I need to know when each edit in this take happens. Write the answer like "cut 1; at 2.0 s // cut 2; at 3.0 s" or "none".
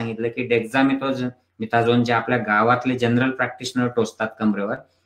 none